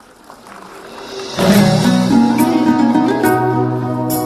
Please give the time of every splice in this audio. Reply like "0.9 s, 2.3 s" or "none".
none